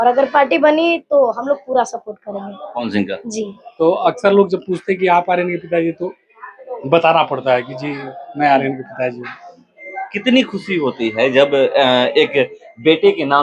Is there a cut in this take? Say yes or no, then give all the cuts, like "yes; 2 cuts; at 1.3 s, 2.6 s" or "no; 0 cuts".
yes; 1 cut; at 3.6 s